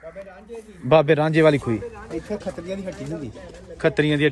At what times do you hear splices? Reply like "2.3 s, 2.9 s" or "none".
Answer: 2.0 s